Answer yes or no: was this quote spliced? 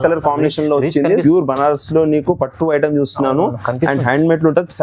yes